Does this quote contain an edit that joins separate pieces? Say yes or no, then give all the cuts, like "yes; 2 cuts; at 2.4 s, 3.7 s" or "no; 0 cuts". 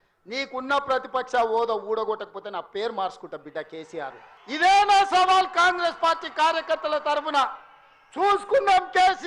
yes; 1 cut; at 4.3 s